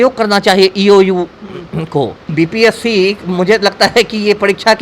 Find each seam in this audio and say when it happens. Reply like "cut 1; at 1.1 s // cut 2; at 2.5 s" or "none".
cut 1; at 2.3 s

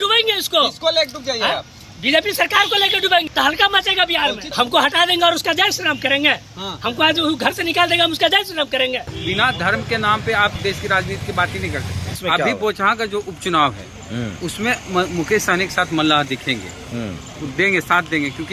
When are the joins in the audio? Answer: cut 1; at 3.3 s // cut 2; at 4.5 s // cut 3; at 9.1 s // cut 4; at 10.6 s // cut 5; at 12.2 s

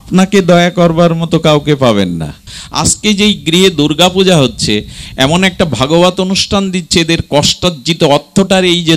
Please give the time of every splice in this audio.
cut 1; at 2.6 s

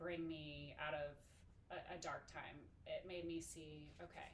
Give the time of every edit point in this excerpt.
none

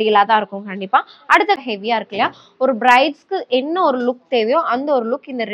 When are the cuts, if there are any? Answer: cut 1; at 1.6 s

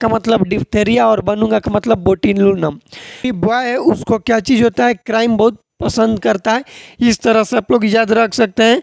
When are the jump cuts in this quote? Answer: cut 1; at 3.3 s

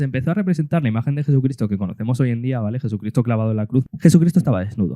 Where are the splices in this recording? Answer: cut 1; at 3.9 s

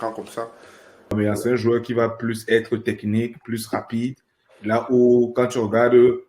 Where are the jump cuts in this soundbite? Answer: cut 1; at 1.1 s

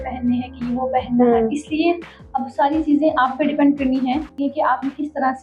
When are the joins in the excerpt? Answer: cut 1; at 4.3 s

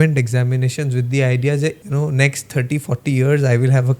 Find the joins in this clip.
cut 1; at 1.8 s

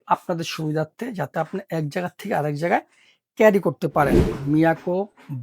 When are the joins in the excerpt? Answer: cut 1; at 4.3 s

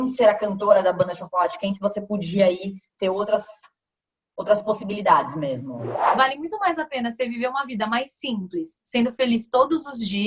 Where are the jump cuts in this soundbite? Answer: cut 1; at 6.0 s

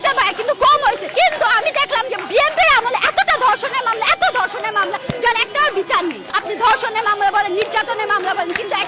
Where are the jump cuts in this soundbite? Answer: cut 1; at 1.0 s // cut 2; at 6.3 s

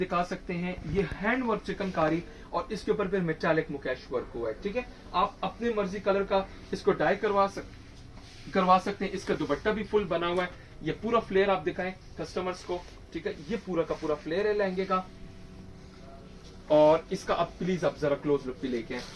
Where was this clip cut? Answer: none

